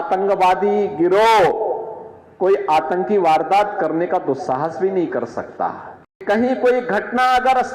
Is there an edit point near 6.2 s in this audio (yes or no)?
yes